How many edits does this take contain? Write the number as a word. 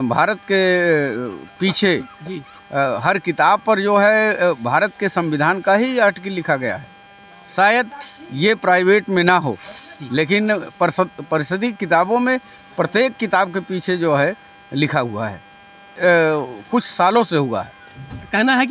one